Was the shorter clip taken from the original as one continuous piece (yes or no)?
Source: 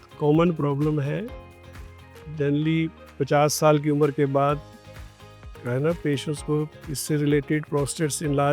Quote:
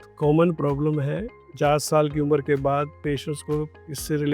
no